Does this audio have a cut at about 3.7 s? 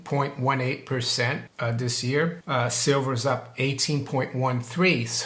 no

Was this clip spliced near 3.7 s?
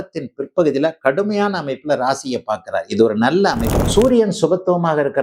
yes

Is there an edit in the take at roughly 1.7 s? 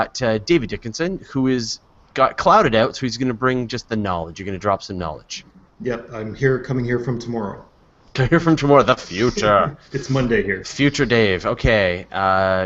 yes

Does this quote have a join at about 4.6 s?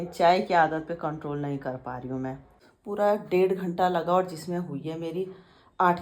no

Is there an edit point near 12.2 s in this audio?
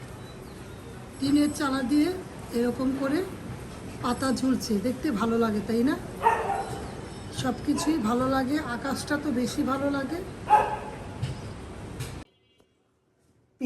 yes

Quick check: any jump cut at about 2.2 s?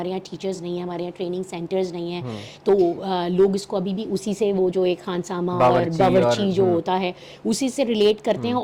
no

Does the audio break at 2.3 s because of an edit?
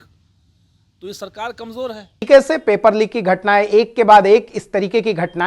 yes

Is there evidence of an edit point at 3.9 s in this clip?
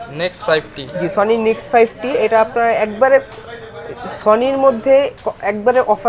no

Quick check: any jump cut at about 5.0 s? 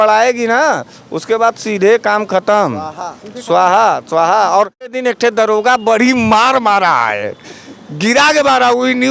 yes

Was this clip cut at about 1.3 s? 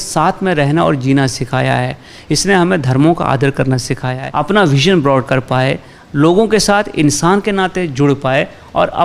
no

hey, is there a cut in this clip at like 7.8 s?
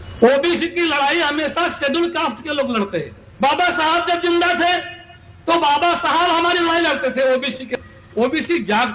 yes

